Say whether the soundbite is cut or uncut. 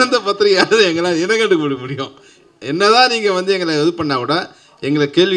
uncut